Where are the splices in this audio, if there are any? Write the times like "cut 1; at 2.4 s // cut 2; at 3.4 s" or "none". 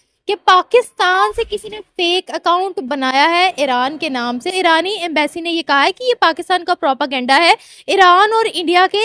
cut 1; at 4.5 s